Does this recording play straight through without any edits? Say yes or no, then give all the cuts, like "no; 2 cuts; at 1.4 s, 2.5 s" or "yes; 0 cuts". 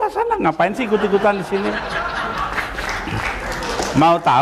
yes; 0 cuts